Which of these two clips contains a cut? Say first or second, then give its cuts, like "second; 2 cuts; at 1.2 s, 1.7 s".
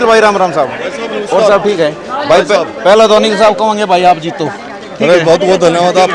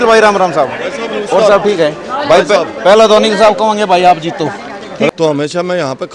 second; 1 cut; at 5.1 s